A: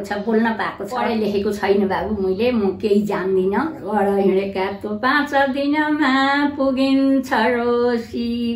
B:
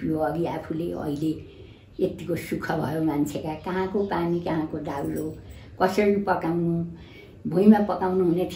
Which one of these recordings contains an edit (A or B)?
A